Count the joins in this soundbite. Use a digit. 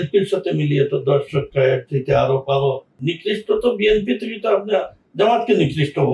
1